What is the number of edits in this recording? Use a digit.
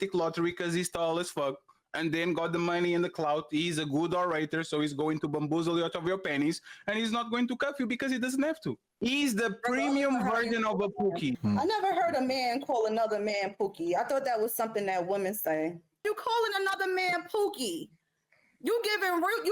3